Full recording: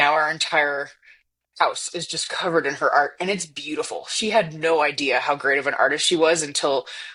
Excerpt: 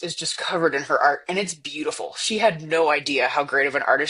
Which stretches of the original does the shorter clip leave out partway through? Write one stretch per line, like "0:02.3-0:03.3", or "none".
none